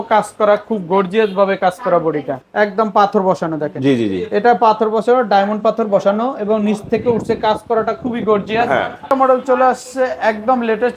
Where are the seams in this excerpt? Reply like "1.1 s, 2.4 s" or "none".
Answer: 2.4 s, 9.1 s

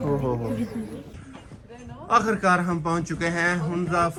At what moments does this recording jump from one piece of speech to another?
none

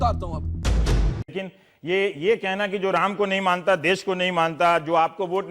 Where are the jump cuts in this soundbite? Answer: 1.3 s

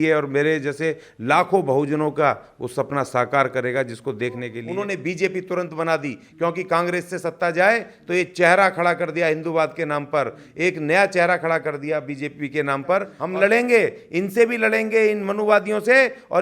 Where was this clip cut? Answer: 4.6 s, 13.2 s

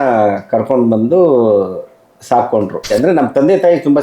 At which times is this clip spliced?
2.9 s

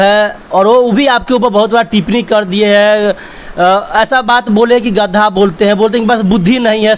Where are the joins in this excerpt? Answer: none

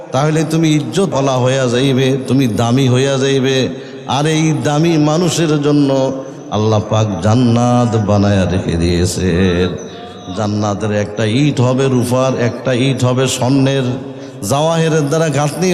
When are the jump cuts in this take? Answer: 1.1 s

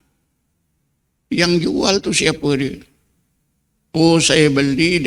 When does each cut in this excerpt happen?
none

